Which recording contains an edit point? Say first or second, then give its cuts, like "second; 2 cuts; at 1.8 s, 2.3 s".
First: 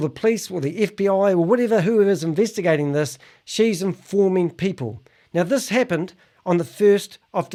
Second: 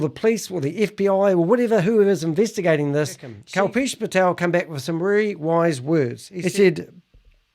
second; 2 cuts; at 3.4 s, 6.2 s